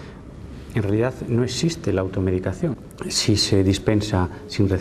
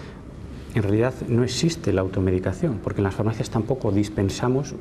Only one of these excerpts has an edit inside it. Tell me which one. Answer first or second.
first